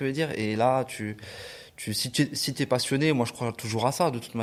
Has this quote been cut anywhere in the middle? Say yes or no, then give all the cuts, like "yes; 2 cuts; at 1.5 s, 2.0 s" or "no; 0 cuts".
no; 0 cuts